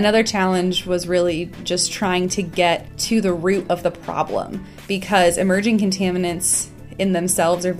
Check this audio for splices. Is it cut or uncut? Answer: cut